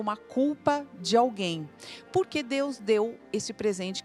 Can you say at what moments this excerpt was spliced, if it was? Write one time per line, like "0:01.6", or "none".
none